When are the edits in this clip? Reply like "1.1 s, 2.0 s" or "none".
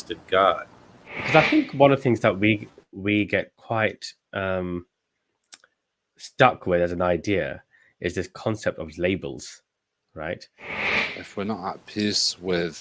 1.2 s, 10.8 s